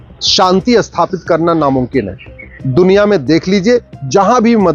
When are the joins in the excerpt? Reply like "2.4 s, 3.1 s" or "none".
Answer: none